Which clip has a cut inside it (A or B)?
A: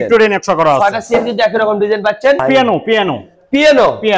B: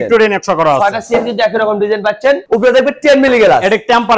A